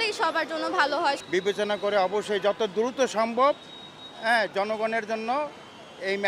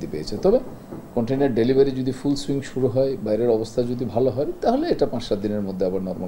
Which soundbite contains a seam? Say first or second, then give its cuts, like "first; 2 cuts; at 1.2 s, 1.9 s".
first; 1 cut; at 1.2 s